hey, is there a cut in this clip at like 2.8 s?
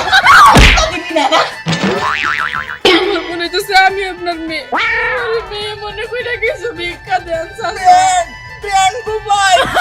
yes; 1 cut; at 2.8 s

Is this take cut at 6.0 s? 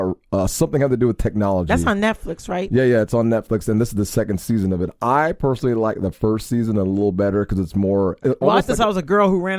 no; 1 cut; at 8.2 s

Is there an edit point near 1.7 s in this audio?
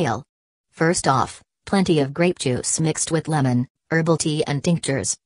no; 1 cut; at 3.9 s

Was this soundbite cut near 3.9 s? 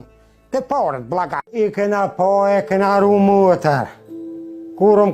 no; 1 cut; at 1.4 s

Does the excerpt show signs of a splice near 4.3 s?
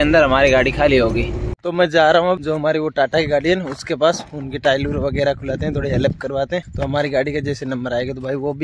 no; 3 cuts; at 1.6 s, 2.4 s, 6.7 s

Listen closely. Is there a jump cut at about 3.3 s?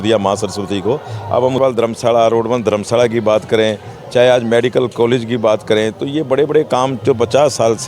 no; 1 cut; at 1.6 s

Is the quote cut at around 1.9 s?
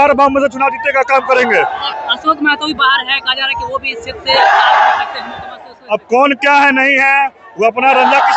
yes; 1 cut; at 1.9 s

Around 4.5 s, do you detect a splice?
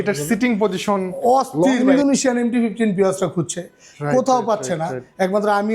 no; 1 cut; at 1.8 s

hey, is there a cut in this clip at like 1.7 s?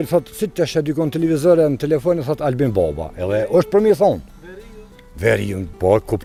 no; 0 cuts

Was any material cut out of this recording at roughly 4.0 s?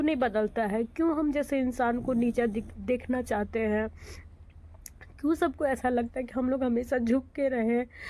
no; 0 cuts

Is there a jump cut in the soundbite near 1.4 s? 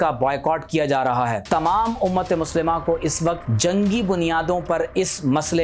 yes; 2 cuts; at 1.4 s, 3.5 s

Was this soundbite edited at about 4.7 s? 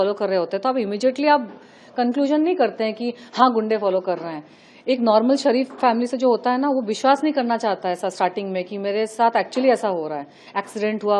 no; 0 cuts

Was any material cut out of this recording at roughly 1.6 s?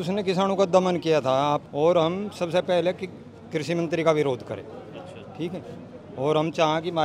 yes; 1 cut; at 1.6 s

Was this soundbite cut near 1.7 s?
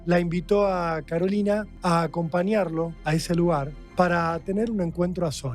yes; 3 cuts; at 1.7 s, 3.0 s, 3.8 s

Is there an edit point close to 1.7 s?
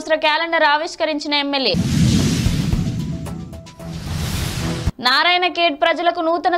no; 0 cuts

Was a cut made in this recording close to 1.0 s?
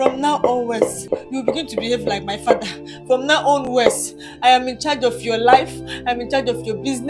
yes; 1 cut; at 1.0 s

